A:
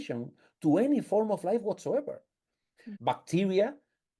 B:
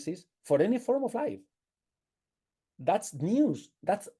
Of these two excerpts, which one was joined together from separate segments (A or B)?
A